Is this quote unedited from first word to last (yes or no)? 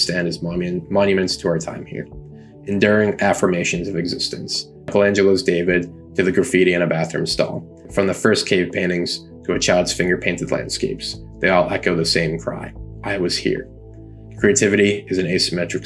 yes